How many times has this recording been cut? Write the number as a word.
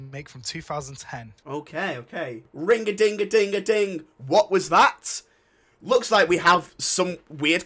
two